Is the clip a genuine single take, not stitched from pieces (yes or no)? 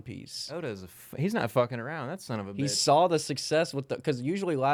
yes